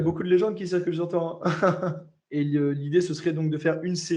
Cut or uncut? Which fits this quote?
cut